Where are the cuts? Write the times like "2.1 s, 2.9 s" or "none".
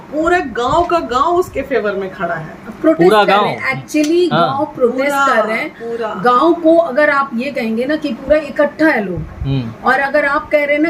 none